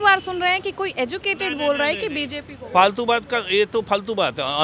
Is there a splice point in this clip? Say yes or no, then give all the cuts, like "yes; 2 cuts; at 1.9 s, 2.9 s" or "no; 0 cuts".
no; 0 cuts